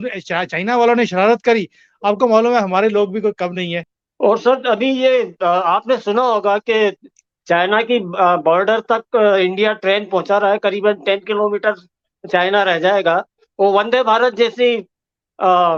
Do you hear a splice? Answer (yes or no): no